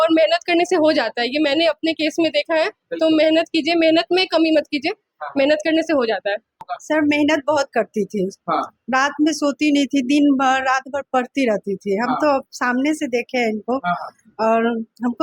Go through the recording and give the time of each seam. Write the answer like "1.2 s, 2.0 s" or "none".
6.7 s